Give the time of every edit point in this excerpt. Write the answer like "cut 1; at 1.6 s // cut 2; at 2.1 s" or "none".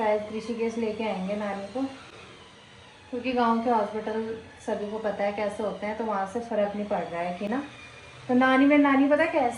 none